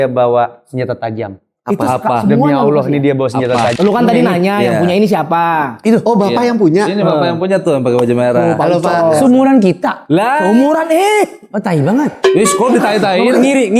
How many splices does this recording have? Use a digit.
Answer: 1